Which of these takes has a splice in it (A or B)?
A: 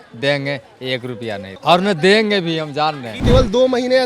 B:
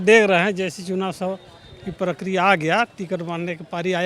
A